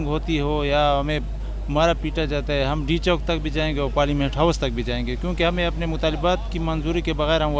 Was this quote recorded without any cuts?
yes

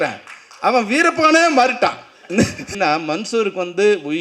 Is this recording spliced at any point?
yes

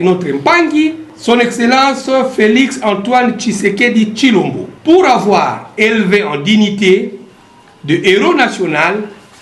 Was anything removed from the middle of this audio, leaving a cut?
yes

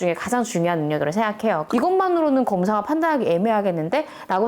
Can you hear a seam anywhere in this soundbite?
yes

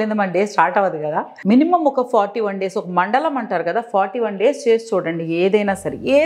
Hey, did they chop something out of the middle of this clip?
yes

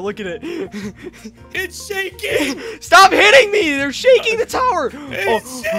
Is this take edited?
yes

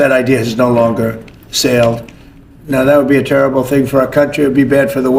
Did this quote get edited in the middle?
no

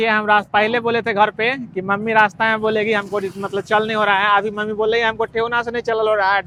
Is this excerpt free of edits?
yes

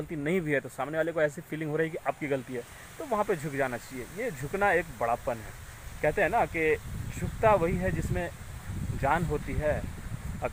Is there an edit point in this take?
no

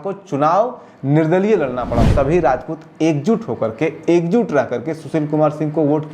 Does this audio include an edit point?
yes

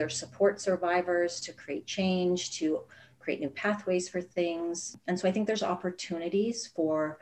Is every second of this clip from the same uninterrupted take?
no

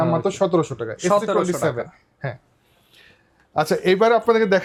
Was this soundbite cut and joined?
no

